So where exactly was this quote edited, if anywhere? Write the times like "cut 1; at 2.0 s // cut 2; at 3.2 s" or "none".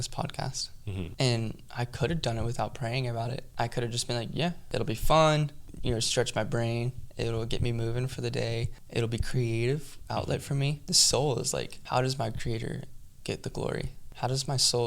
cut 1; at 1.1 s // cut 2; at 3.4 s // cut 3; at 4.6 s // cut 4; at 5.7 s // cut 5; at 8.8 s // cut 6; at 11.0 s // cut 7; at 11.8 s // cut 8; at 14.0 s

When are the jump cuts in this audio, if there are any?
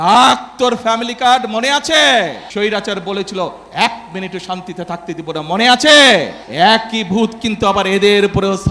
cut 1; at 2.4 s // cut 2; at 6.4 s

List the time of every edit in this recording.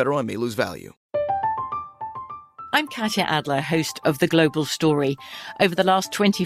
cut 1; at 0.9 s

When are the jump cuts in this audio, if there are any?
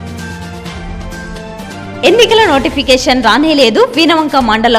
cut 1; at 1.7 s

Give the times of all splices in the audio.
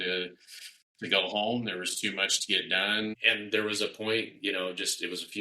cut 1; at 3.2 s

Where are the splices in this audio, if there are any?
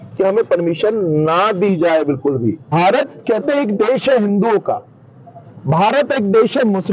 cut 1; at 2.7 s

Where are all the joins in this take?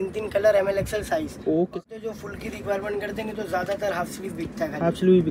cut 1; at 1.7 s

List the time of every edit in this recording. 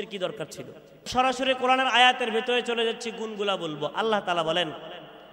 cut 1; at 1.1 s

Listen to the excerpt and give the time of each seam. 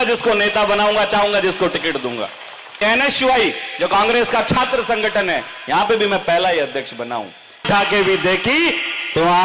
cut 1; at 2.8 s // cut 2; at 7.6 s

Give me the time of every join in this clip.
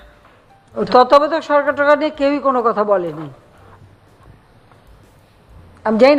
none

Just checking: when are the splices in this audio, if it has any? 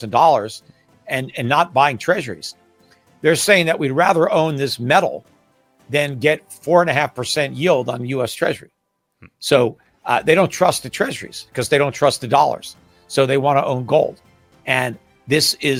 none

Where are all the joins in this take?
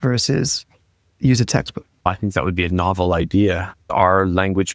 cut 1; at 2.1 s // cut 2; at 3.9 s

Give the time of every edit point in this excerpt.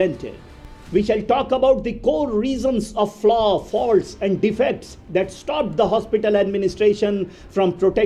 none

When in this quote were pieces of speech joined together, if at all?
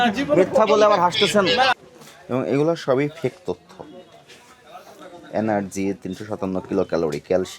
cut 1; at 1.7 s

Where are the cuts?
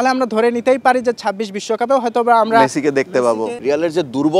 cut 1; at 3.4 s

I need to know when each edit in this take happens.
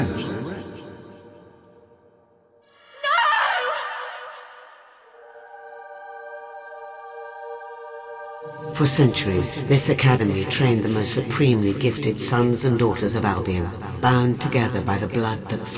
none

